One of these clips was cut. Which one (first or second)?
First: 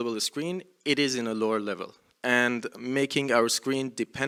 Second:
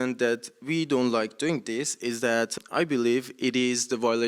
second